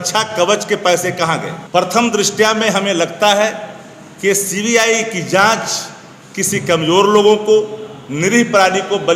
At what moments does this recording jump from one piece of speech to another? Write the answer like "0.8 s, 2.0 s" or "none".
1.5 s